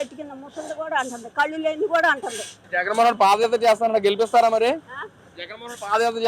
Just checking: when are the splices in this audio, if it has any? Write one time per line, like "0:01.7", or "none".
0:02.6